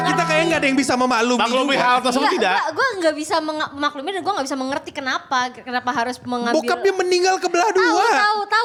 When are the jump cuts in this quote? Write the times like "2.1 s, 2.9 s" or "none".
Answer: none